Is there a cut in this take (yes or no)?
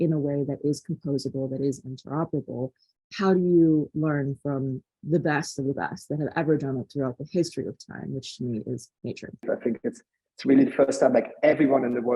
yes